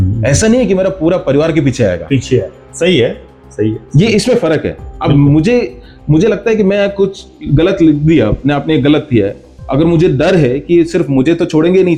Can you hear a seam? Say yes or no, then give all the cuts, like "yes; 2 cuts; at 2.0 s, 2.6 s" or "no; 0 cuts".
no; 0 cuts